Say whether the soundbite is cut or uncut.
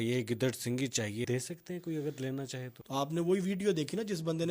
cut